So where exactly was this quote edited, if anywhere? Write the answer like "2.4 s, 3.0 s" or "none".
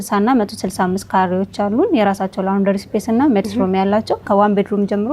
4.2 s

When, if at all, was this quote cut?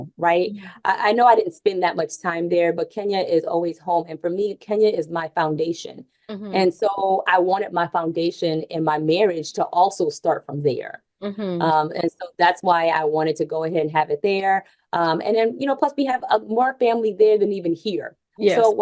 none

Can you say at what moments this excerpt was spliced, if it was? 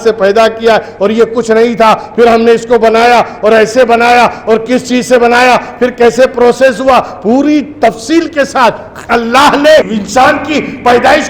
none

